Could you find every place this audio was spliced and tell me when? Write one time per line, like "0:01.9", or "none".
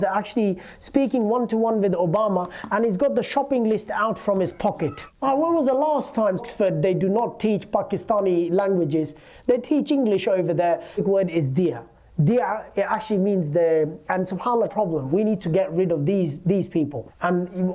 0:06.5
0:11.0
0:14.7